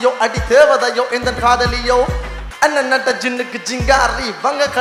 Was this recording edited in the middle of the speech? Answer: no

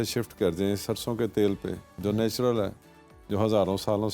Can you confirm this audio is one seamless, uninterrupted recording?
yes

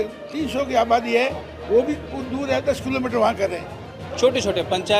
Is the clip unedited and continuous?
no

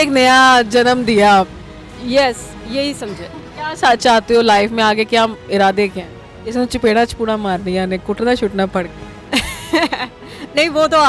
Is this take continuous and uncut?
yes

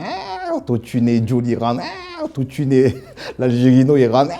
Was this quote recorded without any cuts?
yes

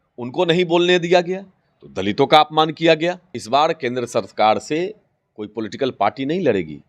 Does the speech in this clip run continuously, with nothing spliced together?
no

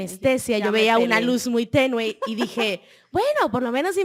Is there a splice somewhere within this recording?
no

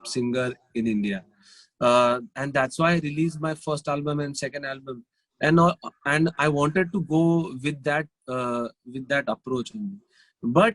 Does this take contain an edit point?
no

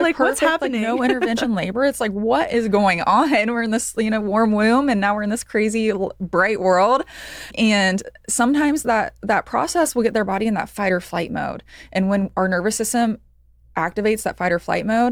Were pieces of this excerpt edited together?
no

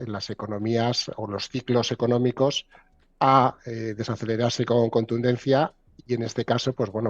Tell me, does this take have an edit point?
no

